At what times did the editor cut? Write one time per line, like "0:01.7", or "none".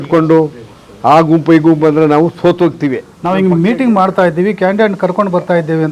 0:03.1